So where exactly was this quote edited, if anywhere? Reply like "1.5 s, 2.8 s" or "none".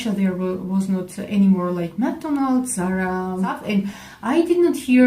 3.6 s